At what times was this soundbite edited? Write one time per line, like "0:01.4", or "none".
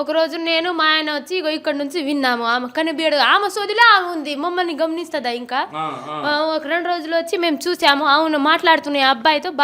none